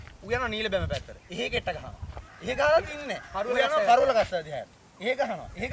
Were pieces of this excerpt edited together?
no; 0 cuts

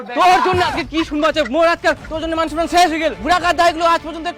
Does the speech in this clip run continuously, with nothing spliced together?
yes; 0 cuts

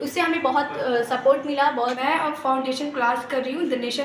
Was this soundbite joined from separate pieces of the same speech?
yes; 1 cut; at 2.0 s

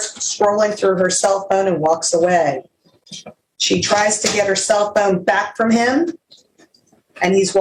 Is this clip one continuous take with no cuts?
yes; 0 cuts

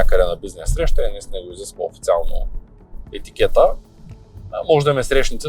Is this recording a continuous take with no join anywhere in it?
yes; 0 cuts

